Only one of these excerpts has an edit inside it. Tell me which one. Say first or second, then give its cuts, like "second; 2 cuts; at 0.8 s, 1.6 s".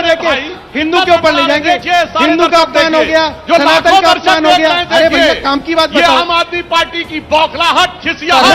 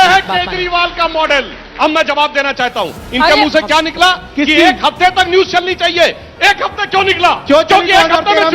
second; 1 cut; at 1.6 s